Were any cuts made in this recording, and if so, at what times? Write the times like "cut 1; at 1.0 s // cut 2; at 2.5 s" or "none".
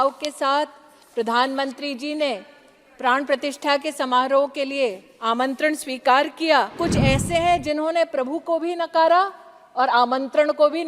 cut 1; at 6.8 s